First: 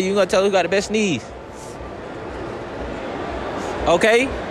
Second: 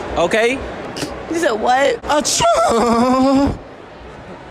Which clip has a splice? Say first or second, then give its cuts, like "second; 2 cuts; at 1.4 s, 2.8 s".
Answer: second; 1 cut; at 2.0 s